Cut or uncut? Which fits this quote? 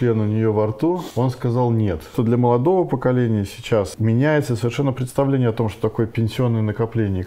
cut